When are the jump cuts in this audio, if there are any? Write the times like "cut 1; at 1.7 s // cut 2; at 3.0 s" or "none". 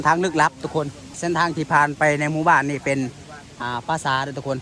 cut 1; at 1.2 s